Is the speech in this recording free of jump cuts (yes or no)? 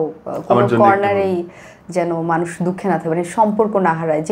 yes